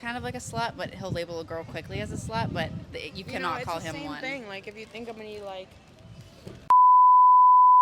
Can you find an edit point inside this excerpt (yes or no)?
no